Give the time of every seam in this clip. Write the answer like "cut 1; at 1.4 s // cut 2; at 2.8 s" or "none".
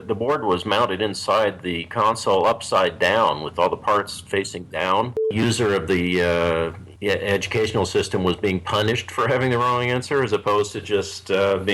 cut 1; at 5.3 s // cut 2; at 6.8 s